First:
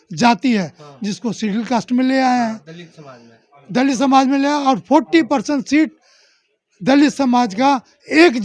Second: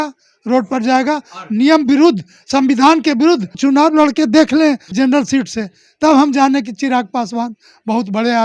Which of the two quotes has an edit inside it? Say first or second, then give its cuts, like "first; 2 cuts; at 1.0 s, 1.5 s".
second; 2 cuts; at 3.6 s, 4.9 s